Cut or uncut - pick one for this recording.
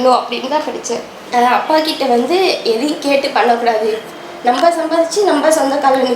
uncut